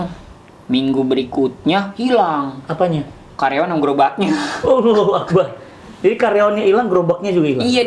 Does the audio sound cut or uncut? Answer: uncut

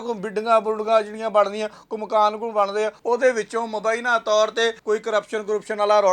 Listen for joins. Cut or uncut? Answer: cut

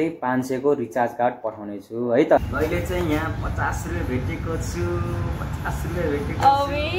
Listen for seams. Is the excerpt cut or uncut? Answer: cut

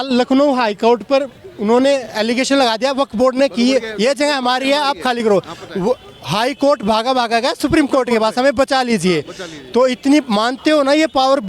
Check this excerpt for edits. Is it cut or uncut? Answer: uncut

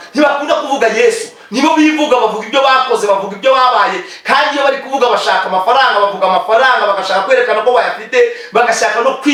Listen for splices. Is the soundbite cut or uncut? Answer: uncut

